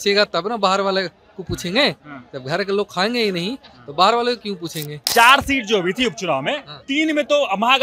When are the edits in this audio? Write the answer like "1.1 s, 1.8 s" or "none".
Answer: 4.9 s